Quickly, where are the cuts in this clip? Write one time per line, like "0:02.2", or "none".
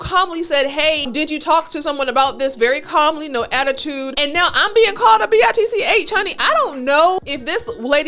0:01.1
0:04.1
0:07.2